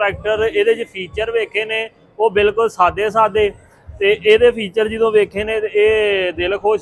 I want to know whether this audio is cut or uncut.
uncut